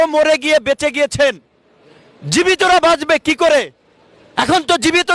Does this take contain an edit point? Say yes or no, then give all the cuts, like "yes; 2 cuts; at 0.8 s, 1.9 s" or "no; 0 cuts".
no; 0 cuts